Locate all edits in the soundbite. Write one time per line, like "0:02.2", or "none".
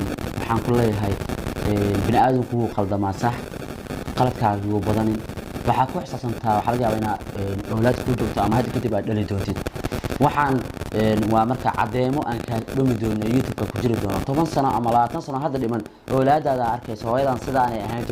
none